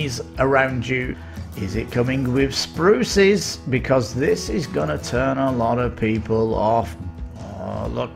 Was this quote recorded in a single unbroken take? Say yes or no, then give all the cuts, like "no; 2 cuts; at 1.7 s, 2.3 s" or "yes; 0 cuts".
no; 2 cuts; at 1.2 s, 7.0 s